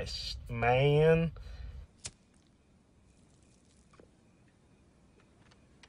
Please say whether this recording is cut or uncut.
cut